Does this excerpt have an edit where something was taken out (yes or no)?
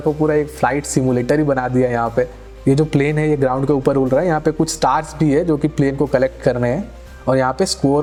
no